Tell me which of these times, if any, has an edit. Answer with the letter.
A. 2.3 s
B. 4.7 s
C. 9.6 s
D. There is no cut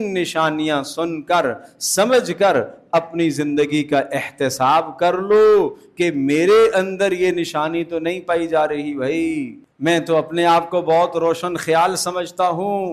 C